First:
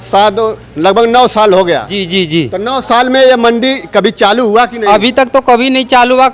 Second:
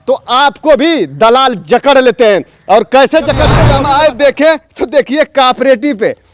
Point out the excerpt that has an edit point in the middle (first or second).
second